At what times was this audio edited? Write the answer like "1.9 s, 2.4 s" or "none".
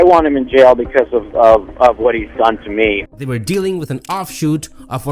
3.0 s